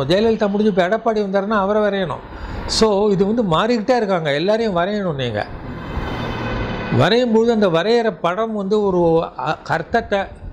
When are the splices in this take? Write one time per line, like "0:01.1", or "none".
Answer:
none